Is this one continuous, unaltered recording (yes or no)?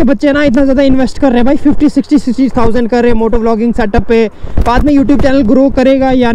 yes